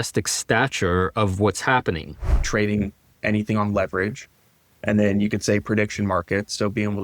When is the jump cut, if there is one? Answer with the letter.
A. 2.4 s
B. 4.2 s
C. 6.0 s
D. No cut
A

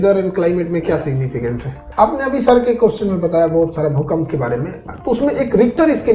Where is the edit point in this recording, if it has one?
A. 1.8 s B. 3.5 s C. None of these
A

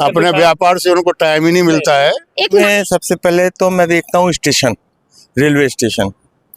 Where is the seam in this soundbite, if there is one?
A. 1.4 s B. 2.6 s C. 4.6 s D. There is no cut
B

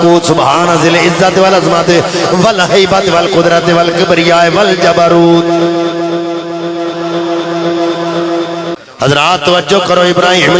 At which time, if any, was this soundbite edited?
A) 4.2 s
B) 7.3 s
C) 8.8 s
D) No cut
C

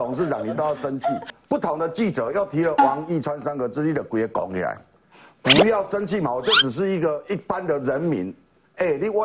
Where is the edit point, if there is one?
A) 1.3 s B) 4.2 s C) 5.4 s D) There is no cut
A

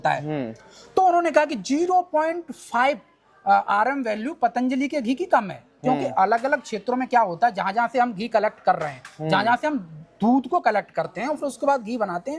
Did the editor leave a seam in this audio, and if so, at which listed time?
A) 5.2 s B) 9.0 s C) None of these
C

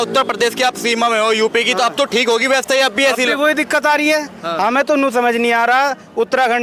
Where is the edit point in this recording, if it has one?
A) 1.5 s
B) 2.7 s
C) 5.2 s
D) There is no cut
D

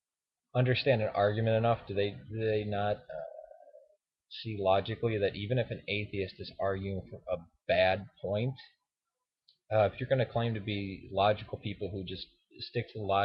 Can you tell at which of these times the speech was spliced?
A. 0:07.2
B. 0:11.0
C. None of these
A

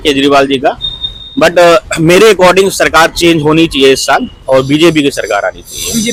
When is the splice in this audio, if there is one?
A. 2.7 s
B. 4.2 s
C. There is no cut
C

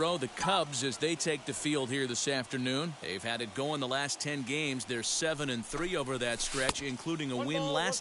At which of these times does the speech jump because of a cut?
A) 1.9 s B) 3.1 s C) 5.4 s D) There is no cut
D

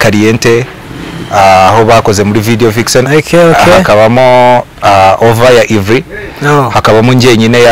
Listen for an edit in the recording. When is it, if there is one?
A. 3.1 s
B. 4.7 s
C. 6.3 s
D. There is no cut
A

